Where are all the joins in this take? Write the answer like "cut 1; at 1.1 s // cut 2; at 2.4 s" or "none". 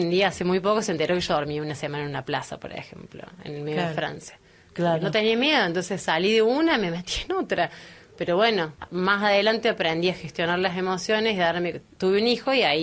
none